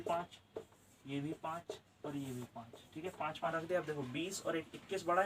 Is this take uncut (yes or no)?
no